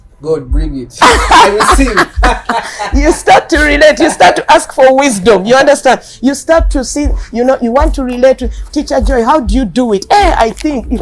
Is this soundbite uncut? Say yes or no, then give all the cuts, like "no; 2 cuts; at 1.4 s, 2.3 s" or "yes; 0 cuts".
yes; 0 cuts